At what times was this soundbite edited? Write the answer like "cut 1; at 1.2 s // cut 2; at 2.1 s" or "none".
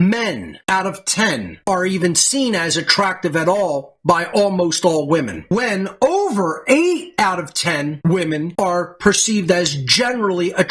none